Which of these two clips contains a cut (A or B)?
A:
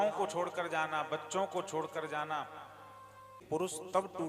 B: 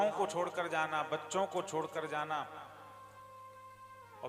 A